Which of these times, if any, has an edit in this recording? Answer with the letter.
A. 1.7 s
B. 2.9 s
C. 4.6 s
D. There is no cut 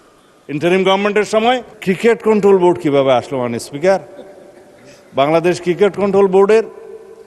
A